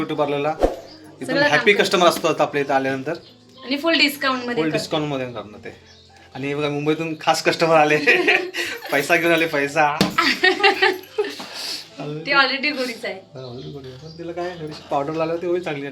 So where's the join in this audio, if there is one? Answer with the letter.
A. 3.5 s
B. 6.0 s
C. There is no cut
C